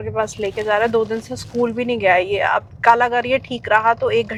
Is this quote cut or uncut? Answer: uncut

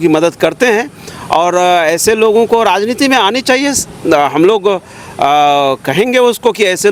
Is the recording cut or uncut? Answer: uncut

